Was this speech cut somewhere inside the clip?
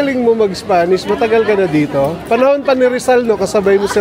no; 0 cuts

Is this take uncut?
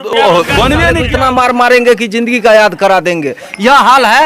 no; 1 cut; at 1.0 s

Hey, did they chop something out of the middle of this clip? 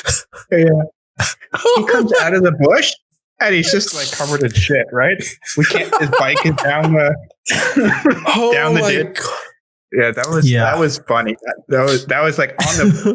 no; 0 cuts

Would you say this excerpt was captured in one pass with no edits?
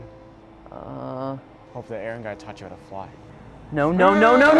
no; 1 cut; at 1.6 s

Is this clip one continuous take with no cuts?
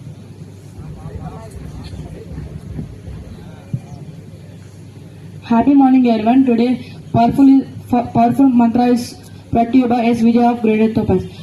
yes; 0 cuts

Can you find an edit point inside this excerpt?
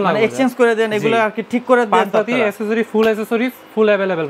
no; 0 cuts

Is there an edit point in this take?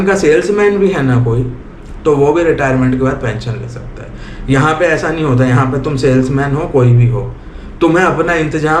no; 0 cuts

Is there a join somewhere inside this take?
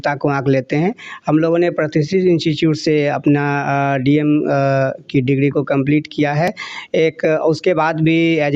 no; 0 cuts

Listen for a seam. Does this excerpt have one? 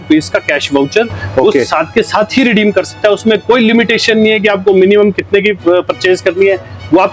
no; 0 cuts

